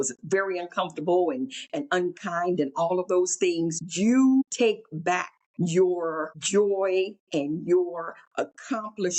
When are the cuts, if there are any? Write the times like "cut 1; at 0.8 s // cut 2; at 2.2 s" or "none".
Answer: cut 1; at 3.8 s // cut 2; at 5.0 s // cut 3; at 6.3 s // cut 4; at 7.2 s